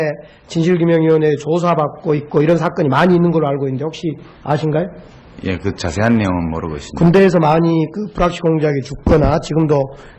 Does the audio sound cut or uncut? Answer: cut